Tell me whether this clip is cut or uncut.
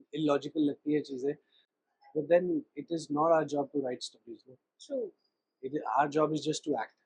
uncut